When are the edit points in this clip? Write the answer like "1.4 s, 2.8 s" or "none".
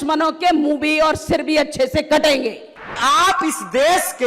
3.0 s